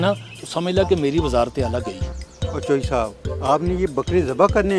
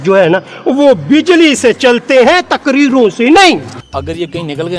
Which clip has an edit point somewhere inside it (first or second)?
second